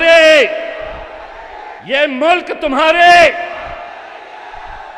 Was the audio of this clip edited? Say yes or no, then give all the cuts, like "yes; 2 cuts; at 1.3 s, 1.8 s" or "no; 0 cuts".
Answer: yes; 1 cut; at 1.7 s